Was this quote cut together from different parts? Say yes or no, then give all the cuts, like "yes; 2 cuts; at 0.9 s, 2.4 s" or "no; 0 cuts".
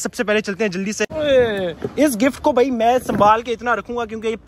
yes; 1 cut; at 1.1 s